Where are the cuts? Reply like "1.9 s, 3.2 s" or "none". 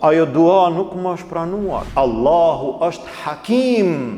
1.8 s